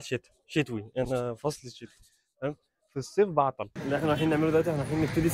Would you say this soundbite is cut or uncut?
cut